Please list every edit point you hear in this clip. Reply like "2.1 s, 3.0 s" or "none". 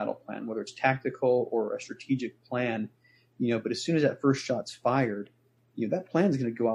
none